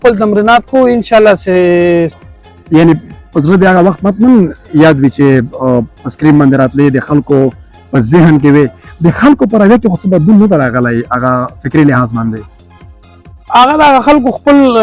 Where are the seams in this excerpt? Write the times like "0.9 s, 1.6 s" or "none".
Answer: 2.2 s

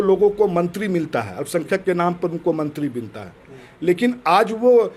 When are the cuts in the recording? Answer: none

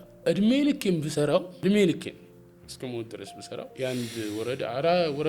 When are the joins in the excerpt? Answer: 1.5 s, 3.7 s

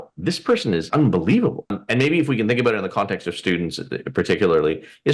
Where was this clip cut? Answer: 0.9 s, 1.8 s

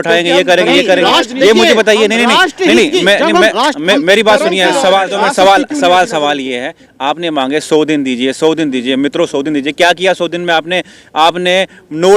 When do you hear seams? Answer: 5.1 s

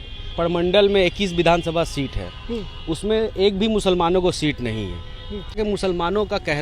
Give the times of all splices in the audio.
5.6 s

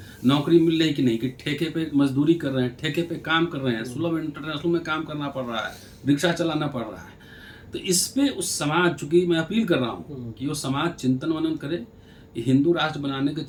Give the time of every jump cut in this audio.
none

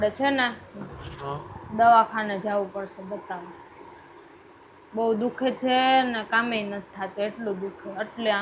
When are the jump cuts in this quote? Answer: none

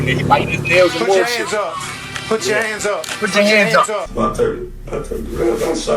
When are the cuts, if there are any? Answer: 4.1 s

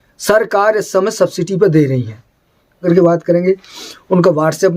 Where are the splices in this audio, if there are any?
2.8 s

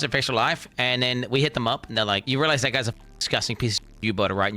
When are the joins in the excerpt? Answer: 2.2 s

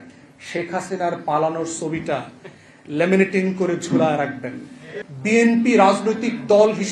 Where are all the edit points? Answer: 4.9 s

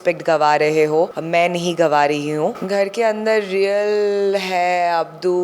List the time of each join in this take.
1.2 s, 2.6 s

